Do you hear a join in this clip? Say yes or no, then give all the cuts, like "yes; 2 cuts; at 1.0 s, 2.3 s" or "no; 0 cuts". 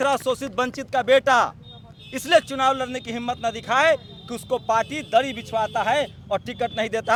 no; 0 cuts